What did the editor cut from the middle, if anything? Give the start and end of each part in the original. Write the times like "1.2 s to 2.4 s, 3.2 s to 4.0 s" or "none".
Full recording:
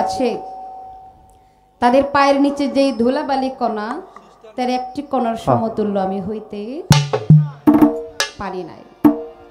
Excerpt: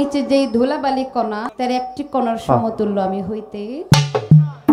3.9 s to 4.5 s